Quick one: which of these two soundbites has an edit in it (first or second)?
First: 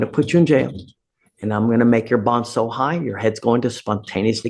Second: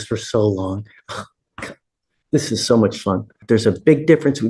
second